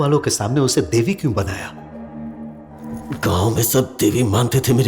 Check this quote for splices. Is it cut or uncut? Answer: cut